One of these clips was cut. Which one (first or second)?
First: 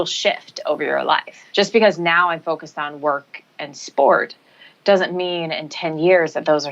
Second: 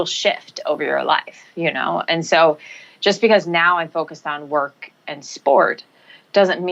first